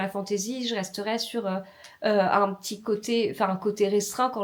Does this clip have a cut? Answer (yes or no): no